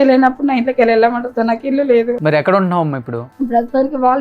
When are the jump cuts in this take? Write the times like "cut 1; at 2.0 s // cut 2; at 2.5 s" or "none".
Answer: cut 1; at 2.1 s // cut 2; at 3.2 s